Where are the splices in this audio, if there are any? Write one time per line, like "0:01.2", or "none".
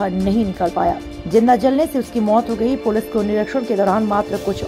none